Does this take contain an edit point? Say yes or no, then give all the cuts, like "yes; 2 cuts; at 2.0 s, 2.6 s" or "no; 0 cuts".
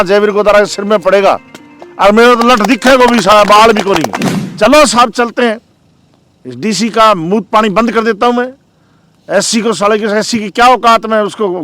yes; 1 cut; at 4.3 s